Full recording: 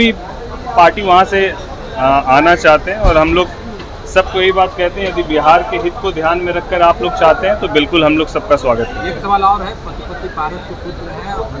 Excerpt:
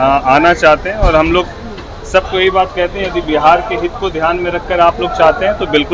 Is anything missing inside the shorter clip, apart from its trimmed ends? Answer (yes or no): no